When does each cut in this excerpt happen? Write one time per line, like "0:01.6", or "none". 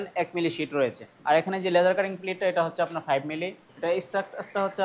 0:01.1
0:03.7